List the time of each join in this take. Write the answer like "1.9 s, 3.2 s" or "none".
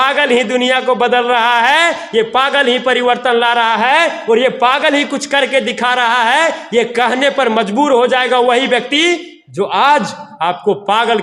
none